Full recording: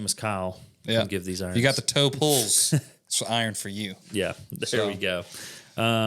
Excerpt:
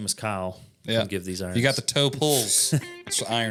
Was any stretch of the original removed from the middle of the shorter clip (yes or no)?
no